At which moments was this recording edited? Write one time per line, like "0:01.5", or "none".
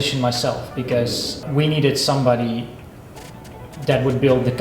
0:01.4